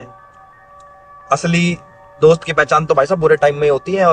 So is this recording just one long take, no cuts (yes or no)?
yes